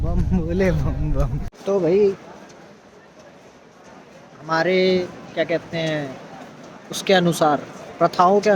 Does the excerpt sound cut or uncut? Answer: cut